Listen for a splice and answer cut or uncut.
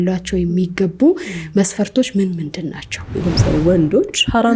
cut